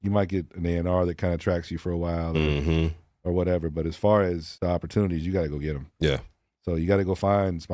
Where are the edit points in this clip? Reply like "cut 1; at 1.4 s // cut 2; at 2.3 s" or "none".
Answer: cut 1; at 4.5 s